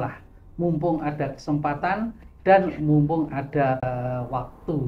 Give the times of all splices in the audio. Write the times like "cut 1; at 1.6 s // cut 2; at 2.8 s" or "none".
cut 1; at 3.8 s